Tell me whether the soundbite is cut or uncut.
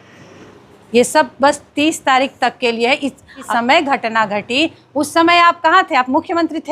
cut